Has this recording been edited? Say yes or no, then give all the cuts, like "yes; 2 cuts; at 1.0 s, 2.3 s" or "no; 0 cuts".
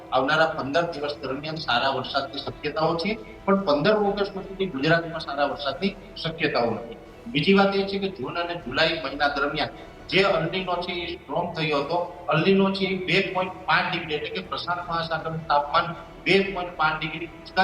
no; 0 cuts